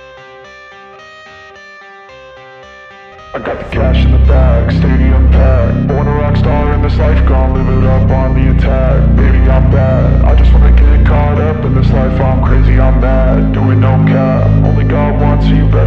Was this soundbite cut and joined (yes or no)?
no